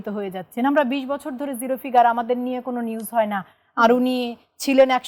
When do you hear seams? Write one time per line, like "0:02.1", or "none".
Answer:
none